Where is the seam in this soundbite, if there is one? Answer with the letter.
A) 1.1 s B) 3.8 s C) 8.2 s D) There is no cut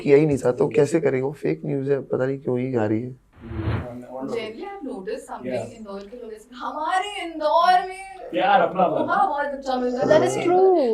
B